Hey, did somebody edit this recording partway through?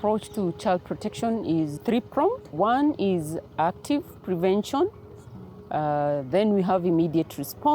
yes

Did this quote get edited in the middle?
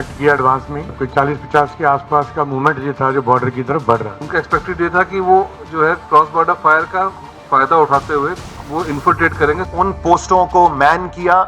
yes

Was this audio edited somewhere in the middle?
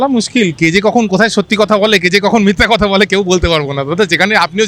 no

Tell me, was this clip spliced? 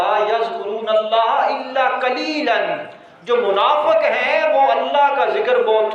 no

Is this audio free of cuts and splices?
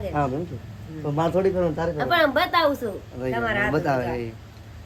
yes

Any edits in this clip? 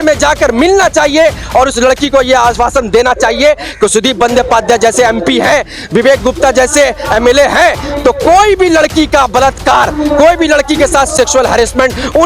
no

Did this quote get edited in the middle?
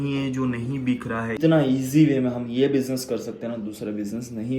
yes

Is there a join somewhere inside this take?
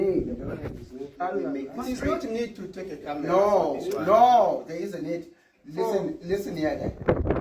yes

